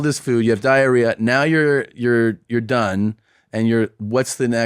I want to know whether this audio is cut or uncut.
uncut